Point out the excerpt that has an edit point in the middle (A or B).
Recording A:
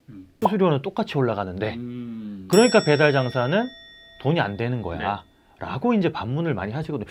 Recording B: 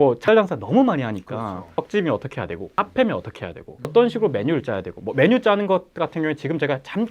B